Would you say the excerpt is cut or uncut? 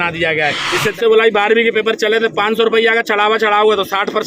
cut